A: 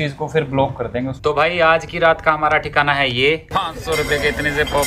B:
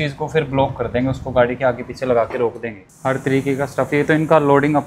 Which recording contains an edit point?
A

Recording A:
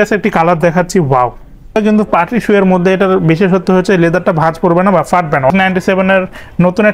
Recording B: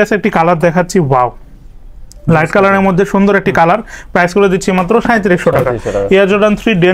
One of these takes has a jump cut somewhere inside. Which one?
A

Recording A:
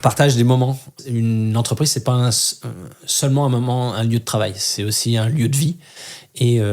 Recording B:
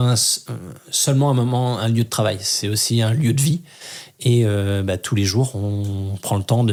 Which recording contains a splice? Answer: A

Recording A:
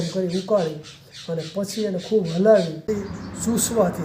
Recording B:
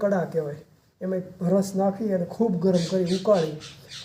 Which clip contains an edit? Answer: A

